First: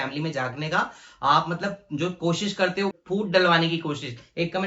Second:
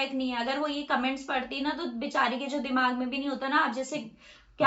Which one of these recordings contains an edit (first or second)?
first